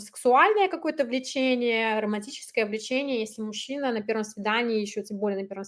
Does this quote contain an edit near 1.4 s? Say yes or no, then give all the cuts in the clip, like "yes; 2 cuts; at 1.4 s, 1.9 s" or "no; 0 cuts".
no; 0 cuts